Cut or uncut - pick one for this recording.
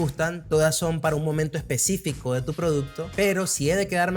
cut